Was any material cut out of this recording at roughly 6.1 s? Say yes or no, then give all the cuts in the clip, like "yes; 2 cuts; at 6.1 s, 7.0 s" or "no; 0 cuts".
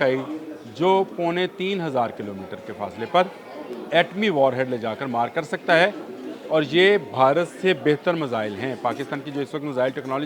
no; 0 cuts